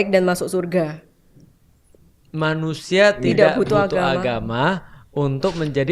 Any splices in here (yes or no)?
no